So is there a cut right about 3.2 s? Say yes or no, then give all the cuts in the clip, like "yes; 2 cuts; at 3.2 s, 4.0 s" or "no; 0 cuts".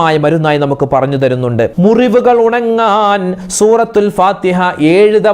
no; 1 cut; at 1.7 s